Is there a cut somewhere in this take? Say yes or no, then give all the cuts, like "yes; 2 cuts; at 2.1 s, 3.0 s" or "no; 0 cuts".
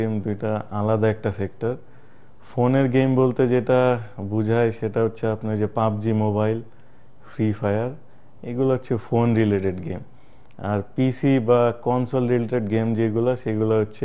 no; 0 cuts